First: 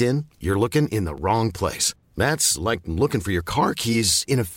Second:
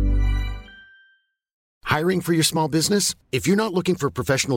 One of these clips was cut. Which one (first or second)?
second